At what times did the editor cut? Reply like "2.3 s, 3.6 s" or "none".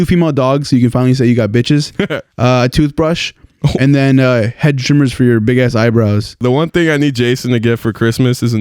6.4 s